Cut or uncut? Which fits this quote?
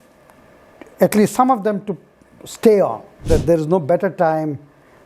cut